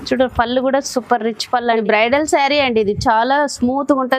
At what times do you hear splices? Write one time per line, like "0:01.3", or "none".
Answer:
0:01.8